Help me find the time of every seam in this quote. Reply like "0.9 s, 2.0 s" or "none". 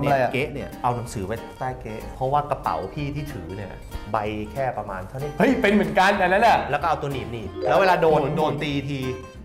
7.7 s